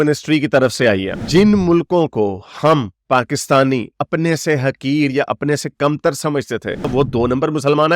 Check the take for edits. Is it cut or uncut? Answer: cut